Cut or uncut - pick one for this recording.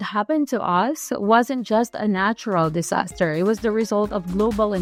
uncut